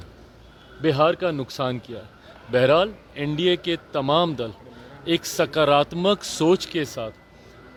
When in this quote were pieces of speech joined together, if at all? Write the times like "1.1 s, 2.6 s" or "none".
none